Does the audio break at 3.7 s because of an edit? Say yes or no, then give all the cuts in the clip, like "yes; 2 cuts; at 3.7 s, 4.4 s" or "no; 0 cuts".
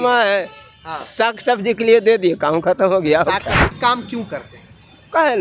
yes; 1 cut; at 3.7 s